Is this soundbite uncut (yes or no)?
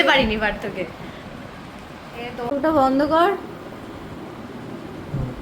no